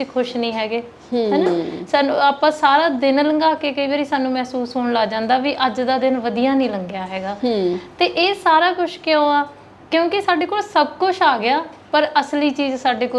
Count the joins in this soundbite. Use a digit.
0